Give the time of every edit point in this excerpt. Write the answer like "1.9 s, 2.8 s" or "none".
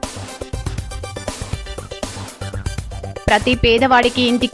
3.2 s